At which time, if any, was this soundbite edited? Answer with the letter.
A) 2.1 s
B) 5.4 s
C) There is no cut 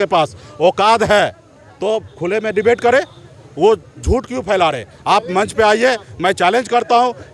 C